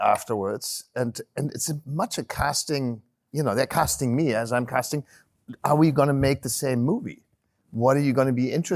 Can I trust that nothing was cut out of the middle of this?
no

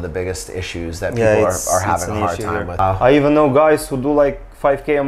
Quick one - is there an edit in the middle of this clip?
yes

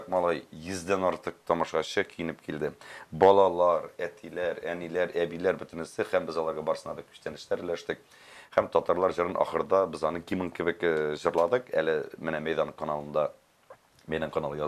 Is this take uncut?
yes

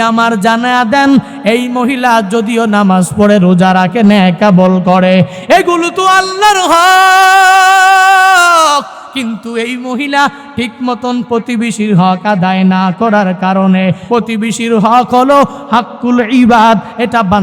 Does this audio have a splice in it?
yes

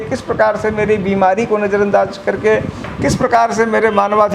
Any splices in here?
no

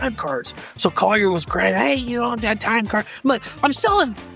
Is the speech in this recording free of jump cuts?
yes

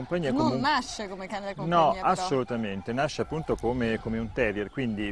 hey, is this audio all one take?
yes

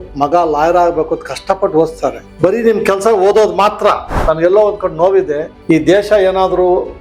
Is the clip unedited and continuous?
no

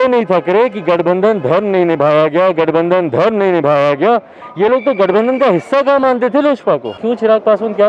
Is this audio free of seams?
no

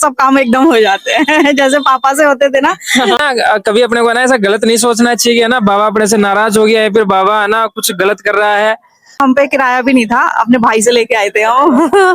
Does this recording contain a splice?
yes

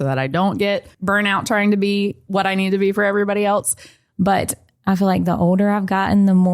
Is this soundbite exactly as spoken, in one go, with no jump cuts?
no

